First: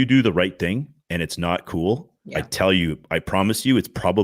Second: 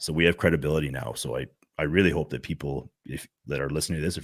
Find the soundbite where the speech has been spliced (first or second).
first